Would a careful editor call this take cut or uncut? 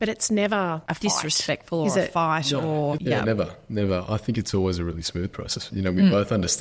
cut